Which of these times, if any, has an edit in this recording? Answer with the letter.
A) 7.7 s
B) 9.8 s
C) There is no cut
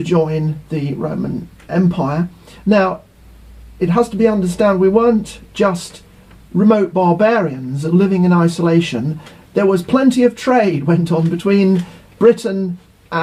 C